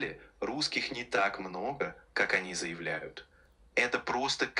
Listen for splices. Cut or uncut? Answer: uncut